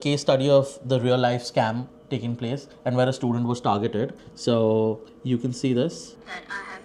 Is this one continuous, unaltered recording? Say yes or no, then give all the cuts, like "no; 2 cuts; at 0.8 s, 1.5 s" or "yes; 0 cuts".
yes; 0 cuts